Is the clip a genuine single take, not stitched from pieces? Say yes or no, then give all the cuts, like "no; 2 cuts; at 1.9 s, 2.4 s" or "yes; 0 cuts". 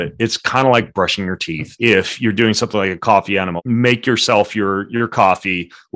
no; 2 cuts; at 1.6 s, 3.5 s